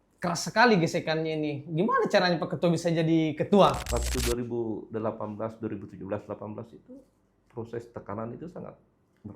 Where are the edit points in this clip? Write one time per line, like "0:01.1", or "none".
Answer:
0:03.9